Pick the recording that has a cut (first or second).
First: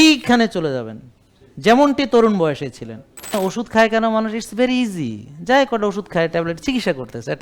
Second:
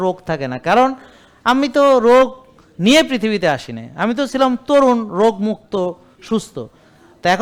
first